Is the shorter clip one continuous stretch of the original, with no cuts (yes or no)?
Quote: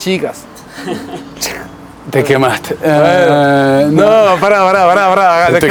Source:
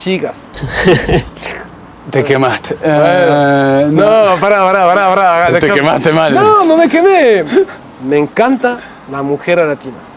yes